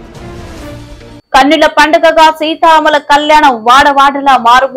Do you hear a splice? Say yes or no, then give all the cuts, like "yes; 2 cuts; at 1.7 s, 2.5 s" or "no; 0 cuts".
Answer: yes; 1 cut; at 1.1 s